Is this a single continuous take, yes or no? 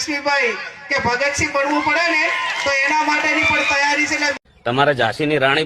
no